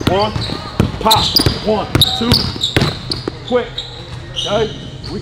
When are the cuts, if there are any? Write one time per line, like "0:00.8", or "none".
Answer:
none